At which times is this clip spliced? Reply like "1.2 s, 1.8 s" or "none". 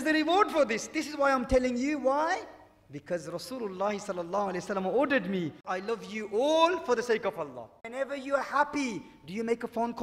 5.7 s, 7.8 s